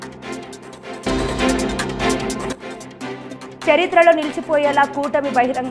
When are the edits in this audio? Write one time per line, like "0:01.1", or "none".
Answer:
0:00.9
0:03.5